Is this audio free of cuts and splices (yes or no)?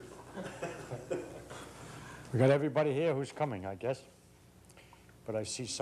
yes